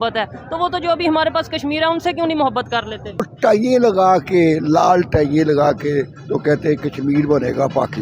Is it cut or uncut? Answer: cut